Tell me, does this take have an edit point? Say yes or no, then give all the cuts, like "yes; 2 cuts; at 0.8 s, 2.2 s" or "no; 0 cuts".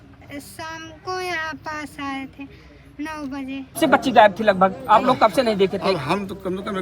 yes; 1 cut; at 3.8 s